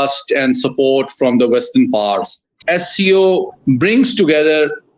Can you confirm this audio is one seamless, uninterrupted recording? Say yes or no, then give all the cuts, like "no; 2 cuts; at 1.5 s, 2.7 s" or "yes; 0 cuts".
no; 1 cut; at 2.6 s